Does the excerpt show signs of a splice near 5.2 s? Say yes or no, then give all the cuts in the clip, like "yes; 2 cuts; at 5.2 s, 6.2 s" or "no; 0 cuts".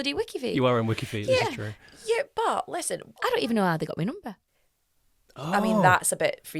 no; 1 cut; at 3.2 s